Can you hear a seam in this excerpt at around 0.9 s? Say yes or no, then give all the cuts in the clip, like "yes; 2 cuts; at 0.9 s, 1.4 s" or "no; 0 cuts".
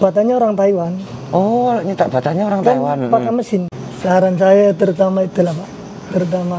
no; 1 cut; at 3.8 s